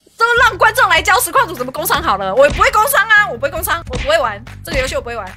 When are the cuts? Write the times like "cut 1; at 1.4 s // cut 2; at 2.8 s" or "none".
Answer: none

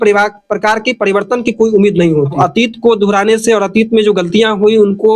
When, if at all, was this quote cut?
cut 1; at 2.3 s

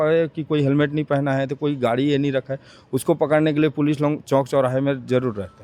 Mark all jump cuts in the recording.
none

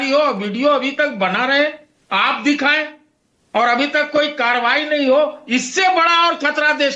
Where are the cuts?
none

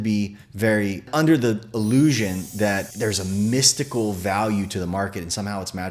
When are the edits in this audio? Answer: none

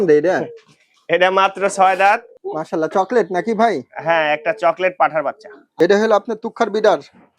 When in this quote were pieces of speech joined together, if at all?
cut 1; at 2.4 s // cut 2; at 5.6 s

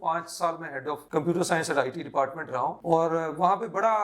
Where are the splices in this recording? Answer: none

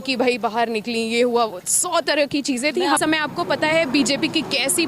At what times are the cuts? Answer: cut 1; at 3.0 s

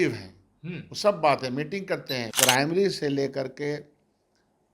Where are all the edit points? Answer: cut 1; at 2.2 s

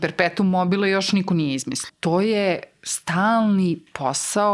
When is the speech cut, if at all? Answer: cut 1; at 1.9 s

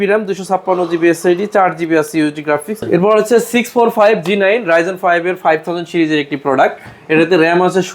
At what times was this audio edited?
cut 1; at 2.7 s

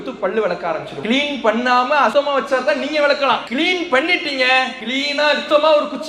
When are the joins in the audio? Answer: cut 1; at 0.9 s // cut 2; at 2.1 s // cut 3; at 3.5 s // cut 4; at 5.1 s

